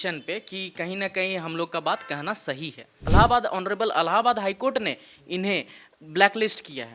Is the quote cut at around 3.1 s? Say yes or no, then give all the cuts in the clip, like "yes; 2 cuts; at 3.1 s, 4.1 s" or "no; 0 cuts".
yes; 1 cut; at 3.1 s